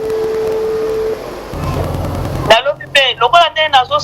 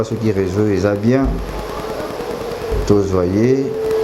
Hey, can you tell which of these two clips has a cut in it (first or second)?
first